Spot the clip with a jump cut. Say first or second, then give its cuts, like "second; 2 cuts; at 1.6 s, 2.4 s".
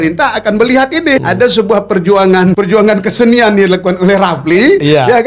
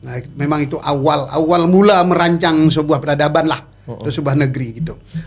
first; 2 cuts; at 1.2 s, 2.6 s